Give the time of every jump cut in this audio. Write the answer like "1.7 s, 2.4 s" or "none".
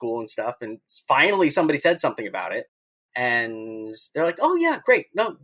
none